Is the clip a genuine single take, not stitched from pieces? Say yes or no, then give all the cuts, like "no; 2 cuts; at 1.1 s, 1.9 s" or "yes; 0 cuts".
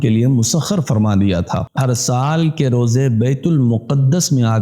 no; 1 cut; at 1.7 s